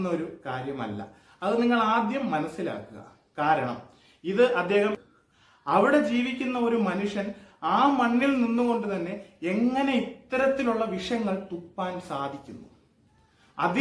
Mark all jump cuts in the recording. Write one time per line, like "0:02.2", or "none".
0:05.0